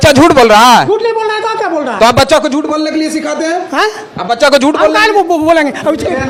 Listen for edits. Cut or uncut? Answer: uncut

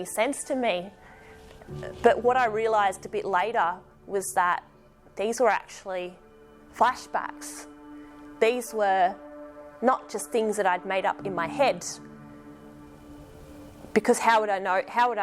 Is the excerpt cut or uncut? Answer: uncut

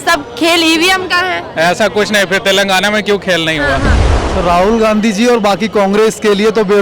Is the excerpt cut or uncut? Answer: cut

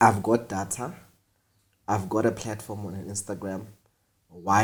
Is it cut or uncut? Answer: uncut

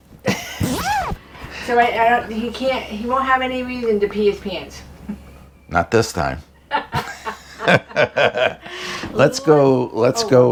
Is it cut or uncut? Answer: uncut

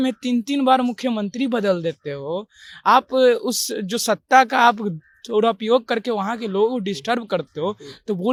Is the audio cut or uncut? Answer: uncut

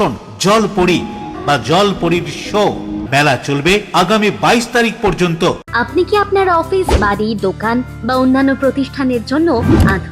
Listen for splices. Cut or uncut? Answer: cut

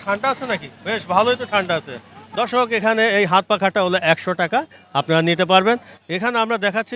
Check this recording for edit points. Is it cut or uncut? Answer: uncut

